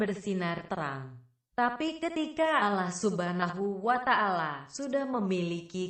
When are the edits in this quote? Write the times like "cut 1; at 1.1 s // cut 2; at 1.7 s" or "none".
cut 1; at 3.1 s